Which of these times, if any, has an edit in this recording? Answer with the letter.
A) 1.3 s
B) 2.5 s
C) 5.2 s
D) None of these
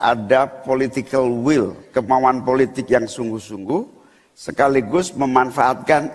D